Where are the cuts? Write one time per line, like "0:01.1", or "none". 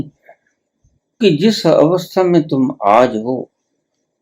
0:01.2